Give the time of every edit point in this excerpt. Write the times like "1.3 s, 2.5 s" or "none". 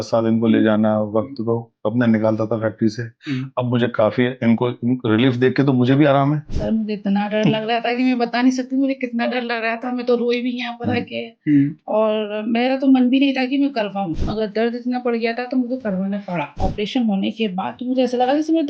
6.5 s, 14.2 s, 16.5 s